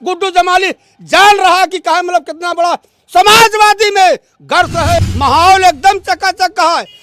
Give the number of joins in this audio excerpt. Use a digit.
1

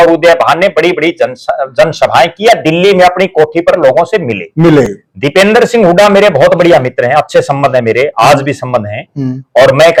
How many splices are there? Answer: 0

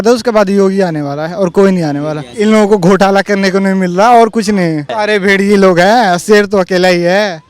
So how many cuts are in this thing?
2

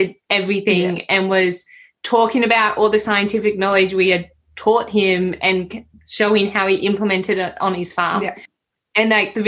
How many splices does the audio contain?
1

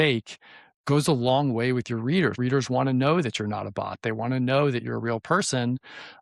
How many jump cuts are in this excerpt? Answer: 1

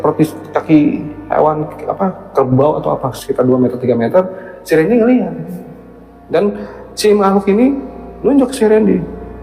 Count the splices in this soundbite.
1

